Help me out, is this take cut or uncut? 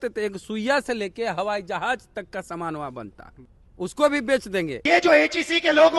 cut